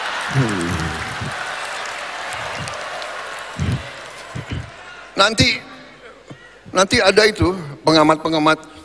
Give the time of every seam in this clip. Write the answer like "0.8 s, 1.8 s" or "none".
none